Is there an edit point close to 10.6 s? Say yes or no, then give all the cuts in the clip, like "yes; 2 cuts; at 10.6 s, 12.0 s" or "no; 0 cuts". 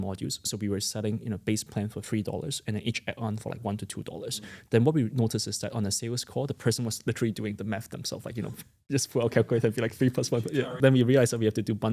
yes; 1 cut; at 10.6 s